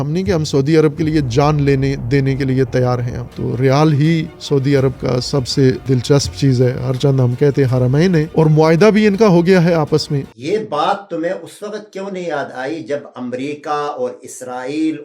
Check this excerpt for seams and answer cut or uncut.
cut